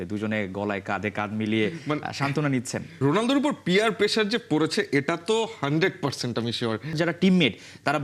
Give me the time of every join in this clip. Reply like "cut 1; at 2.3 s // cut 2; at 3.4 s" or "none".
cut 1; at 2.8 s // cut 2; at 6.9 s